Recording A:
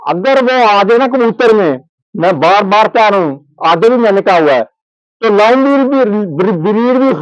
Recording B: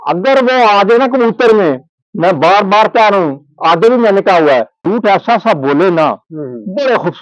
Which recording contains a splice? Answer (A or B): B